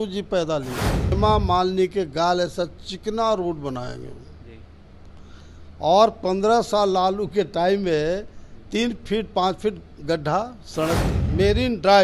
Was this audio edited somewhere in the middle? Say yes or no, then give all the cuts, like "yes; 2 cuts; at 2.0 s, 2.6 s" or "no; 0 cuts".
yes; 2 cuts; at 1.1 s, 11.1 s